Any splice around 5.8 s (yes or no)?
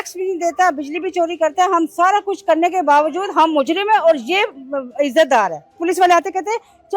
yes